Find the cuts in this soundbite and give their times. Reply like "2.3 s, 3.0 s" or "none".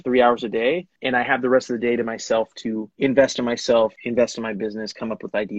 0.9 s, 2.9 s, 4.0 s

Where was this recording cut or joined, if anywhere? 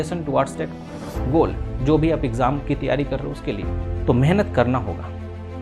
3.9 s

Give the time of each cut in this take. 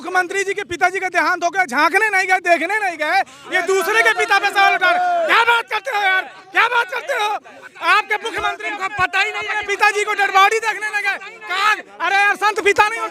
none

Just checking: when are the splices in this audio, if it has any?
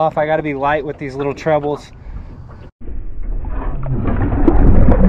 2.8 s

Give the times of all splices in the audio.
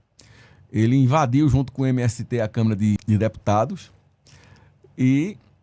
3.0 s

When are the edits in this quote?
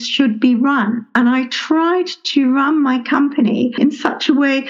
3.8 s

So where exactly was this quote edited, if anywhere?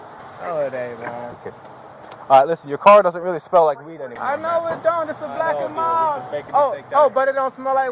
none

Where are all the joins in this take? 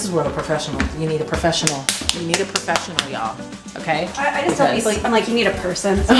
none

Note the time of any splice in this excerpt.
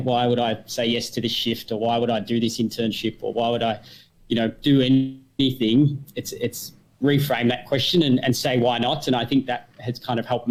none

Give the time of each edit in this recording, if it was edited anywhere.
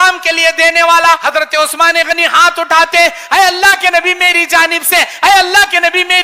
1.2 s

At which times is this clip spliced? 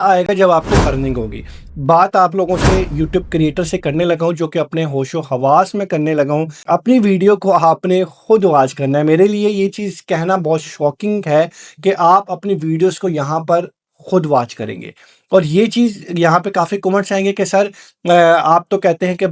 1.6 s

